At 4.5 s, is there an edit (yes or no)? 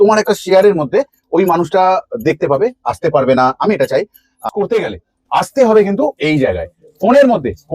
yes